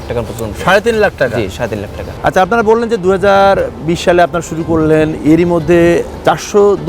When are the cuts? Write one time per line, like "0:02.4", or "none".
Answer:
none